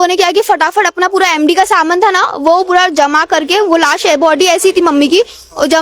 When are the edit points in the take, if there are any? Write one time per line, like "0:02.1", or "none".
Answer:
none